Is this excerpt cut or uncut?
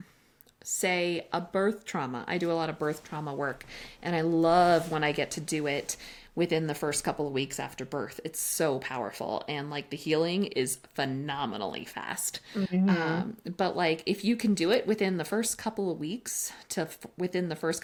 uncut